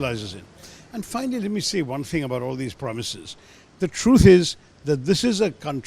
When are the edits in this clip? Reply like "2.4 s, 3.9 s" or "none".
none